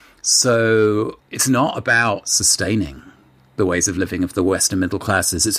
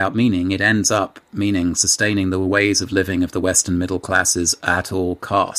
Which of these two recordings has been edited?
first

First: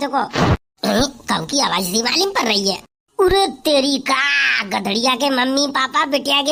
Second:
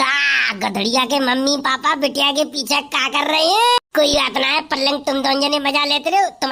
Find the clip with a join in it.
second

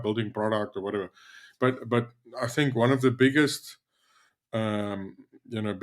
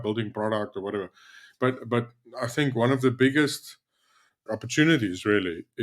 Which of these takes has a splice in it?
second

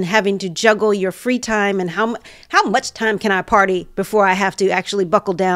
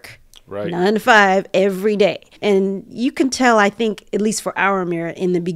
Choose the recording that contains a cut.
second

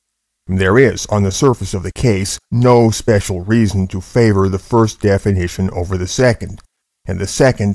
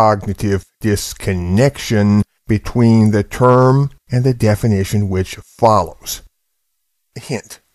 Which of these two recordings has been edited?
first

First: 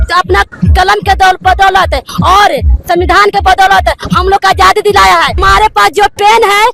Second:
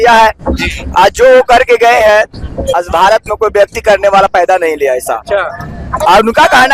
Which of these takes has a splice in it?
first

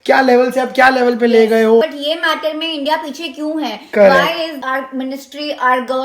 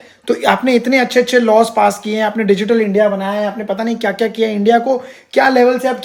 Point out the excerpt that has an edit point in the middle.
first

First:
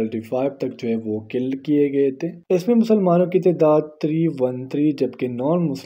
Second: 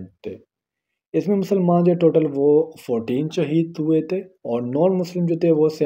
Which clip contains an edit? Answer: first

